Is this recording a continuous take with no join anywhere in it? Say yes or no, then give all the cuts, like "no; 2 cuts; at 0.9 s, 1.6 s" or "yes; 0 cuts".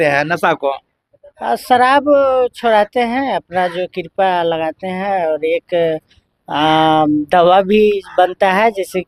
yes; 0 cuts